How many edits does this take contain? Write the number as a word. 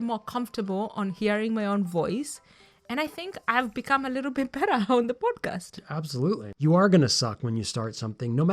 one